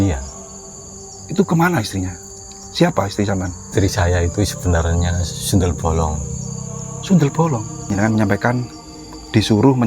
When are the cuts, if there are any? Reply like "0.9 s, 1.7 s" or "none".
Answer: 3.6 s, 7.9 s